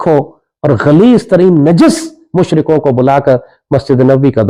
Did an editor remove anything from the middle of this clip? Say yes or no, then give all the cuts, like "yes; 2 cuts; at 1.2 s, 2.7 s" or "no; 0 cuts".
no; 0 cuts